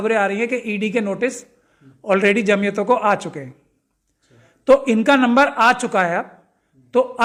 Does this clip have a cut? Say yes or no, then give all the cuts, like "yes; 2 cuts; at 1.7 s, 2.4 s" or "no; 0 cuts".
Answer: no; 0 cuts